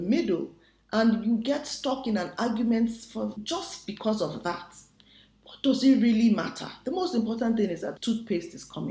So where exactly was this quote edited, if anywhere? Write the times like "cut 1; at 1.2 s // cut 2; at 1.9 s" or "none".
cut 1; at 3.4 s // cut 2; at 8.0 s